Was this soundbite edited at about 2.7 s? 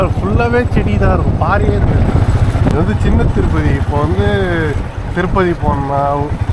yes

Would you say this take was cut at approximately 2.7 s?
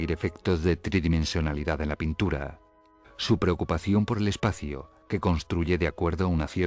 no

